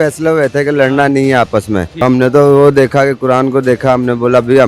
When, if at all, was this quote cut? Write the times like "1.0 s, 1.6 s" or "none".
1.9 s